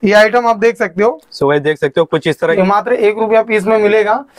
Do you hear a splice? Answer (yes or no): yes